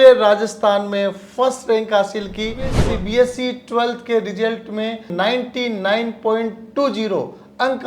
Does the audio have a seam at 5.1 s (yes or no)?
yes